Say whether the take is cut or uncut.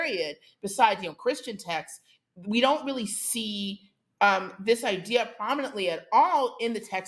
uncut